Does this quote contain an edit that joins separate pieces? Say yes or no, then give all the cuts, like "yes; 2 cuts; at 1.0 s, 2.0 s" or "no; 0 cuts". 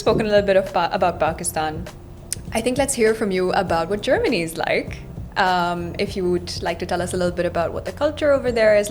no; 0 cuts